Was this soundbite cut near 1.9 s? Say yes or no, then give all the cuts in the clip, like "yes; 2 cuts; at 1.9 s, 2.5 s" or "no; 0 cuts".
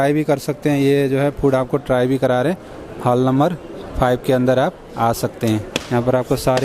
no; 1 cut; at 5.7 s